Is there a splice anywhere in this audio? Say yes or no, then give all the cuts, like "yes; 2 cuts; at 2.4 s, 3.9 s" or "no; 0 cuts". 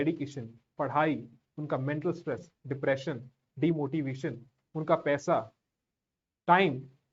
no; 0 cuts